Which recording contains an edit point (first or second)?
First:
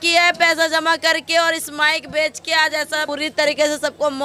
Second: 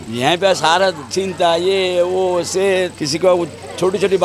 first